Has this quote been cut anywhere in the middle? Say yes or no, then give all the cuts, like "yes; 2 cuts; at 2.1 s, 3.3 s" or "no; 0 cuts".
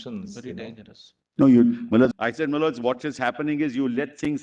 yes; 1 cut; at 2.1 s